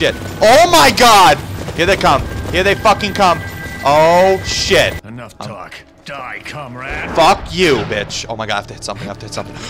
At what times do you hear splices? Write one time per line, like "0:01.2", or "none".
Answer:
0:05.0